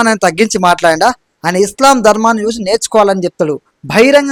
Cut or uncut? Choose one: uncut